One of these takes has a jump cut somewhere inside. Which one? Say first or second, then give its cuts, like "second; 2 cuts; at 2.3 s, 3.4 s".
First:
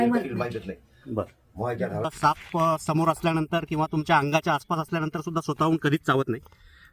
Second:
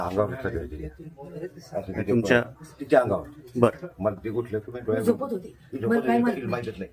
first; 1 cut; at 2.1 s